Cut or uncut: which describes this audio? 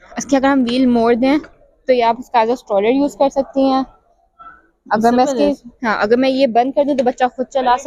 uncut